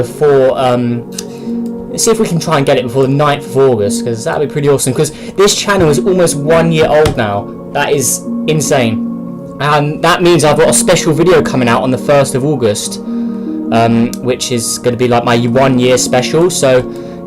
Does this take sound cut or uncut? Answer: cut